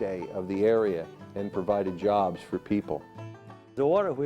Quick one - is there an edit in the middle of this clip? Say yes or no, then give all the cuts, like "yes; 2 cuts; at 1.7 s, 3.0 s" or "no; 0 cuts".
yes; 1 cut; at 3.3 s